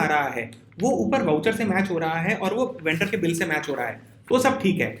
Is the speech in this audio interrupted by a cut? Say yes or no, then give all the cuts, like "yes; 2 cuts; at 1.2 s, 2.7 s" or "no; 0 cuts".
no; 0 cuts